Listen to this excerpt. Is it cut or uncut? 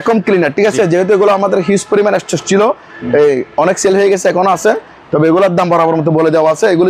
uncut